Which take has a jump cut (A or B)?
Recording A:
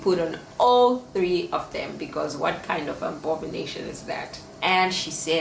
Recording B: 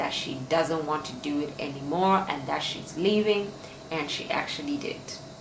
A